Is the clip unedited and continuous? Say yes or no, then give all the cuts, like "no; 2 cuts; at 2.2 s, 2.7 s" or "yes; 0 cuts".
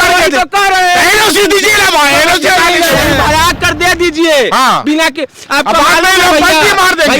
no; 1 cut; at 3.1 s